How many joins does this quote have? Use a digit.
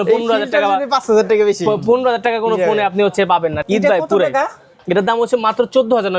1